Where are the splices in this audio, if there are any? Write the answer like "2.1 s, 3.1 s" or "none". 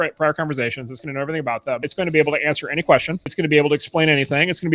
1.9 s, 3.3 s